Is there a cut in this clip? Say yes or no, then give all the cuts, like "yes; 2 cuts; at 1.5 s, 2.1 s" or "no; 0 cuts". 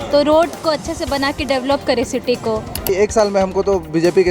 yes; 1 cut; at 2.8 s